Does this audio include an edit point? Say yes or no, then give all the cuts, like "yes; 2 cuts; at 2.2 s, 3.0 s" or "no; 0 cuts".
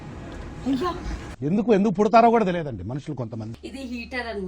yes; 1 cut; at 3.5 s